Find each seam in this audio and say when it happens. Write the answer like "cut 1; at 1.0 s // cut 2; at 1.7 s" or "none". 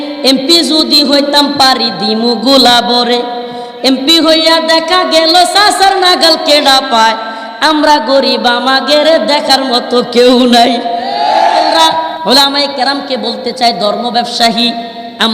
cut 1; at 11.7 s